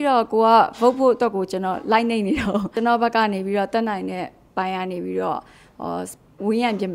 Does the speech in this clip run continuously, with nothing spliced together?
no; 1 cut; at 2.7 s

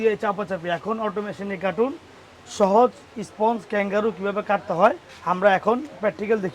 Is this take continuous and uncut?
yes; 0 cuts

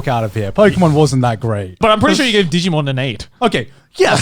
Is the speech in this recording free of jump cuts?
no; 2 cuts; at 1.8 s, 3.2 s

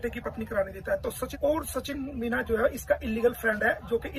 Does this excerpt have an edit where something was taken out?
yes; 1 cut; at 1.3 s

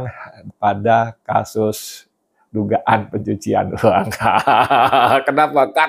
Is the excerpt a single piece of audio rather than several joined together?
yes; 0 cuts

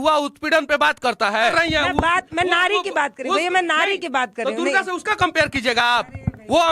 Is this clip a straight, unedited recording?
no; 1 cut; at 1.5 s

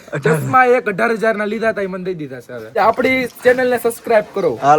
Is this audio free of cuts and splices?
no; 1 cut; at 2.8 s

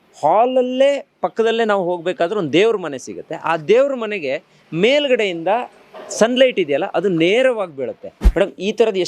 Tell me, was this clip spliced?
yes; 1 cut; at 8.2 s

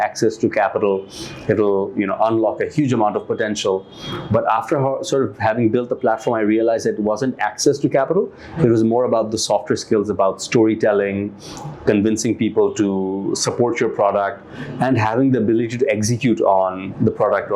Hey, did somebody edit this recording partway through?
no; 0 cuts

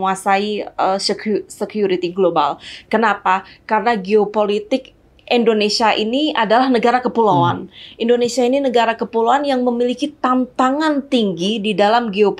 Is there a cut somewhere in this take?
no; 0 cuts

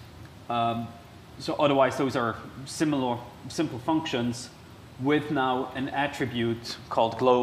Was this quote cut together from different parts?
yes; 1 cut; at 4.3 s

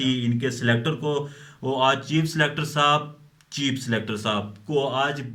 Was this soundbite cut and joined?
no; 0 cuts

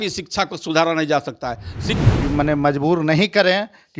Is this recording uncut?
no; 1 cut; at 2.0 s

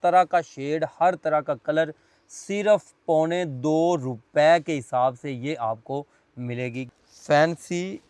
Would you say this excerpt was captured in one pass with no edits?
no; 1 cut; at 6.9 s

